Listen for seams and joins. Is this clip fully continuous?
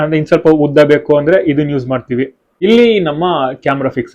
no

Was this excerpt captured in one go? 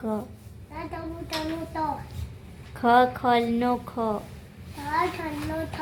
yes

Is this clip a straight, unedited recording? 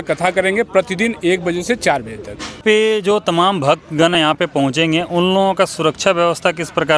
no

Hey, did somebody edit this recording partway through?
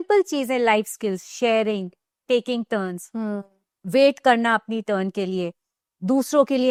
no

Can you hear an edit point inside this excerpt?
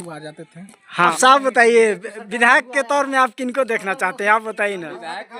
yes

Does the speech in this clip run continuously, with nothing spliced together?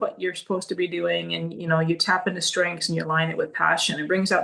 yes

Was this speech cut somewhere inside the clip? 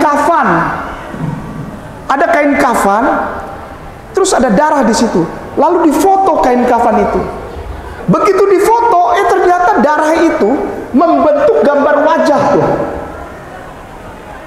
yes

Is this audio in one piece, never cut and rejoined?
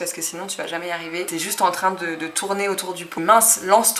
no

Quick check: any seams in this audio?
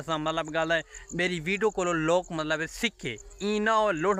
no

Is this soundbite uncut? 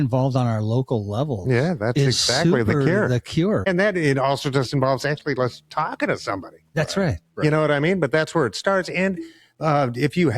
no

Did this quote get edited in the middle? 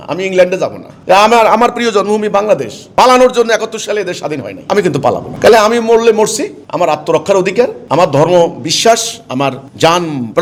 no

